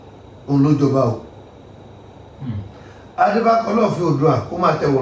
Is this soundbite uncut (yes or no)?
yes